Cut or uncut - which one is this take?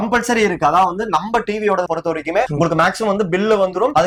uncut